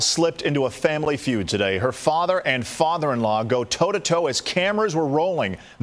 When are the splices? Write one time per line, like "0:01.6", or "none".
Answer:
none